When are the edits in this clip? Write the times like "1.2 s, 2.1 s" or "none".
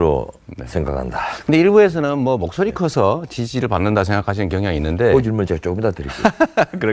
3.3 s